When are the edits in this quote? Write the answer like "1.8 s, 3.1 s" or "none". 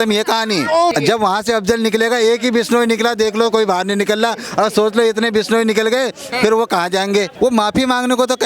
0.9 s, 7.3 s